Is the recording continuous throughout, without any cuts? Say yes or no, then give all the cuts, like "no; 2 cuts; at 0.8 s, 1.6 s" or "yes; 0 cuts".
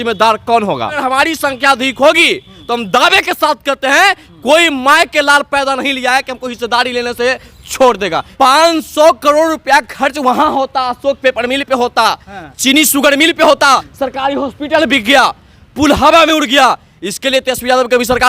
no; 3 cuts; at 1.0 s, 8.3 s, 13.9 s